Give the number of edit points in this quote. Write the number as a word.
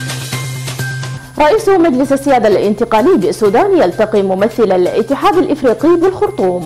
one